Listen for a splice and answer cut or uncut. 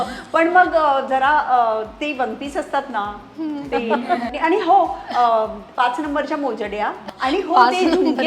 cut